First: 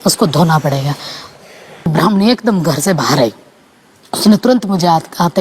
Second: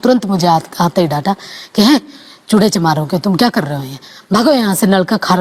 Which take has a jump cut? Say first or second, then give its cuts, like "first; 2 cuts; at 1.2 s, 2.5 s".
first; 1 cut; at 1.9 s